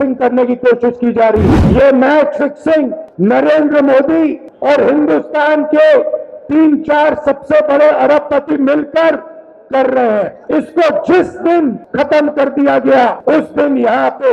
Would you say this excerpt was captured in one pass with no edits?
no; 6 cuts; at 1.6 s, 3.0 s, 4.5 s, 10.4 s, 11.8 s, 13.2 s

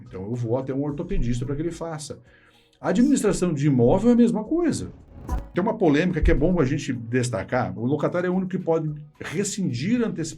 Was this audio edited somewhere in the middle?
yes; 1 cut; at 5.3 s

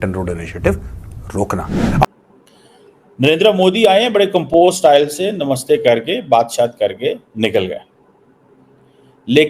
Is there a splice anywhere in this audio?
yes; 1 cut; at 2.0 s

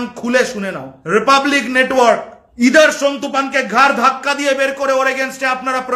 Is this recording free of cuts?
no; 2 cuts; at 0.9 s, 2.4 s

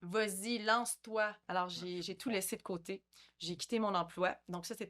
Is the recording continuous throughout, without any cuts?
no; 1 cut; at 1.4 s

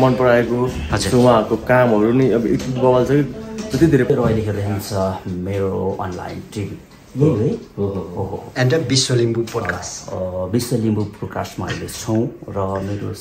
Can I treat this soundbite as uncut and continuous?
no; 1 cut; at 4.1 s

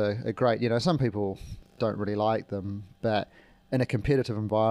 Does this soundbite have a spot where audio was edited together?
no; 0 cuts

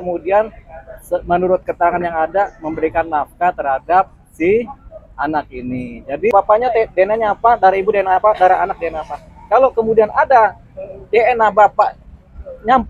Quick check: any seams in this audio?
yes; 1 cut; at 6.3 s

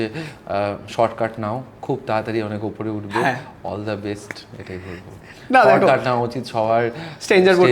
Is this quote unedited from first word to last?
yes; 0 cuts

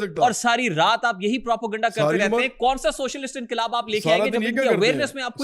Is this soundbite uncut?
yes; 0 cuts

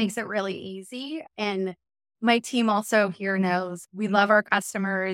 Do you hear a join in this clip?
yes; 2 cuts; at 1.2 s, 3.8 s

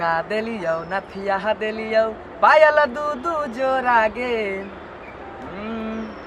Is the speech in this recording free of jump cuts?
yes; 0 cuts

